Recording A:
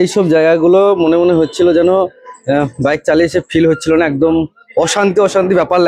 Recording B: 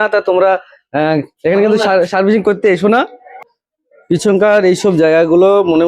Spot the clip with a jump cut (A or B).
B